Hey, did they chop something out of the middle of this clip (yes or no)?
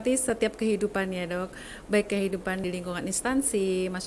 yes